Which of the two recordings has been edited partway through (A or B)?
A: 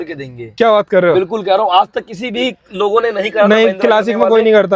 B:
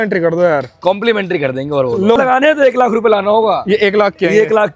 B